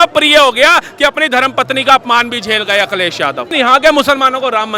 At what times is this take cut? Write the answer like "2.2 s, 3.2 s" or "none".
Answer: 3.5 s